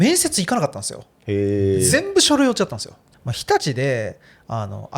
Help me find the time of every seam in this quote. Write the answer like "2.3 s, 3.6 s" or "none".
3.0 s